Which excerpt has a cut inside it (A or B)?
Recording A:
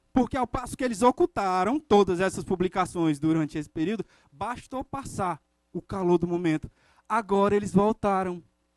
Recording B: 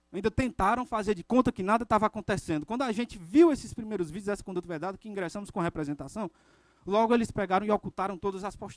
B